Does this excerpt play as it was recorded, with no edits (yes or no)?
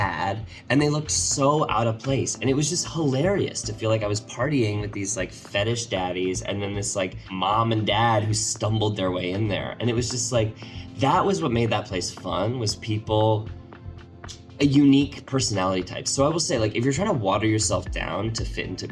no